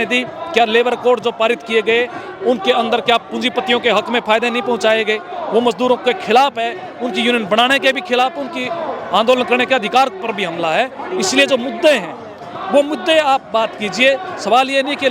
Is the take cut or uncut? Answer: uncut